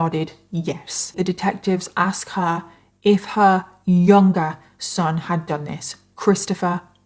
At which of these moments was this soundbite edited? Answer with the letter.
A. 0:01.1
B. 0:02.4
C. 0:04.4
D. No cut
A